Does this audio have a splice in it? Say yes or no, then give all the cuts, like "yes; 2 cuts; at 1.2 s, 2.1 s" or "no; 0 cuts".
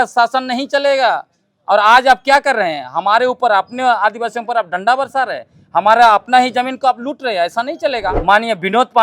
yes; 1 cut; at 8.1 s